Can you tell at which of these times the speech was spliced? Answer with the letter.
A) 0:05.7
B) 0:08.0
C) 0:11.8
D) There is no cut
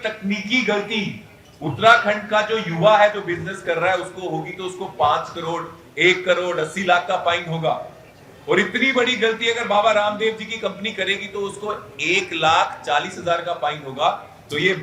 D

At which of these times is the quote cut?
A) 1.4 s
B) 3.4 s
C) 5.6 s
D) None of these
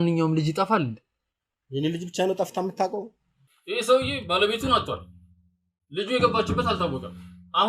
B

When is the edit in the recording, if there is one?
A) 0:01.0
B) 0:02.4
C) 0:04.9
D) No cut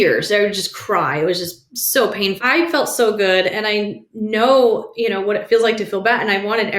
B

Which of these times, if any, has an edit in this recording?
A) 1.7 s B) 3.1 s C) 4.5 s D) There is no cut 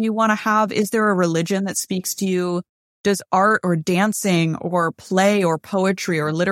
D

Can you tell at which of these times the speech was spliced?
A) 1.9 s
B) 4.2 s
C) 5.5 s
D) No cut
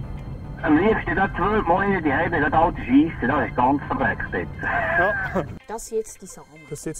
C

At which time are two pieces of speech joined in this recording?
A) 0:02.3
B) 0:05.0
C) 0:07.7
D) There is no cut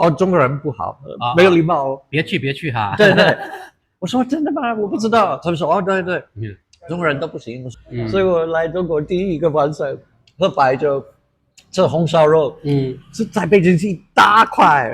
C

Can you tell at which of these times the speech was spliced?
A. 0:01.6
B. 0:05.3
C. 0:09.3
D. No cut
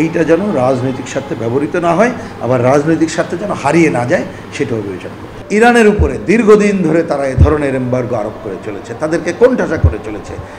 B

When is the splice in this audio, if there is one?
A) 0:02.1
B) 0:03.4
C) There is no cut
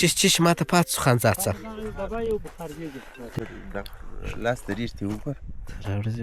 B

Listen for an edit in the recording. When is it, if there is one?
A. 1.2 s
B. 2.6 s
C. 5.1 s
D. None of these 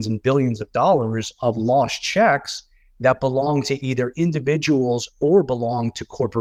D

